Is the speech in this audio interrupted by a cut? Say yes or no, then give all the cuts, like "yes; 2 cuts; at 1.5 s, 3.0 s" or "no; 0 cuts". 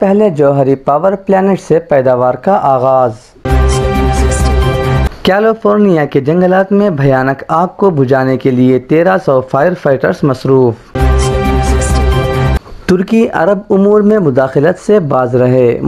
yes; 3 cuts; at 3.4 s, 10.9 s, 12.6 s